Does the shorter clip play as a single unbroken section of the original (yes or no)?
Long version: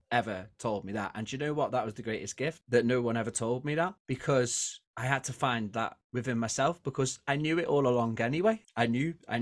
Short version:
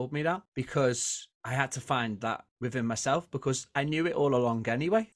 yes